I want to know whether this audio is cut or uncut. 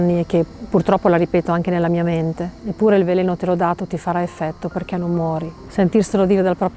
uncut